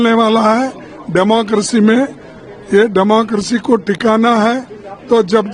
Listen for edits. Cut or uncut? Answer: uncut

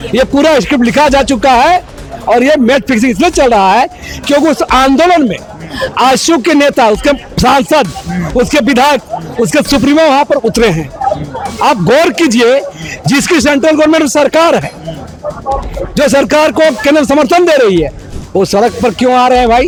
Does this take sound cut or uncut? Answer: uncut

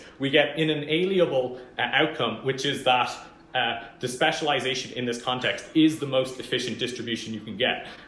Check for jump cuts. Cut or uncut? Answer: uncut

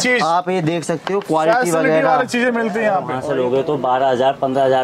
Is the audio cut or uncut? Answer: cut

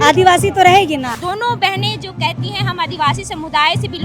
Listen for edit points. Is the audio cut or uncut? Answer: cut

